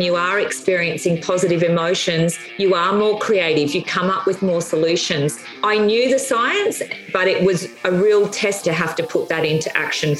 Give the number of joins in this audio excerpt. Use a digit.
2